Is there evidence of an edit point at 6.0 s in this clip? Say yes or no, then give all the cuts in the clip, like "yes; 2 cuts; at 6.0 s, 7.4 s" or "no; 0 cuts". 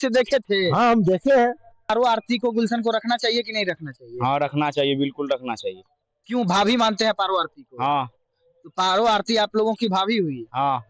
no; 1 cut; at 1.9 s